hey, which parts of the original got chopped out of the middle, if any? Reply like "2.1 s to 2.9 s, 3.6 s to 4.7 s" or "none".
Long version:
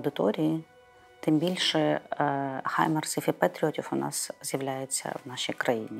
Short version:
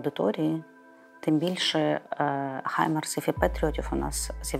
none